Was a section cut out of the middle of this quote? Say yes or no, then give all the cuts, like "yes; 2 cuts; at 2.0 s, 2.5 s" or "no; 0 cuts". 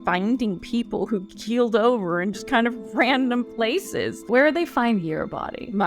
yes; 1 cut; at 4.2 s